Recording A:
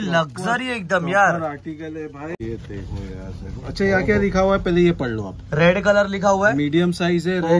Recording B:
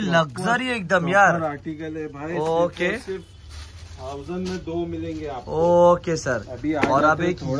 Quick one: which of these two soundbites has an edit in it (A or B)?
A